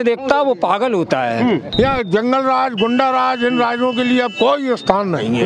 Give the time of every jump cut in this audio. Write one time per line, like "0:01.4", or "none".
0:01.7